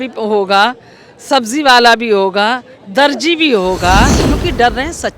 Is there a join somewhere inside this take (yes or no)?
yes